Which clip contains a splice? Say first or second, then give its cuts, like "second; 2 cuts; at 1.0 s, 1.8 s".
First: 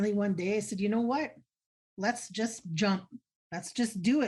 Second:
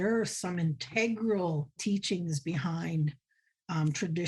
second; 1 cut; at 1.8 s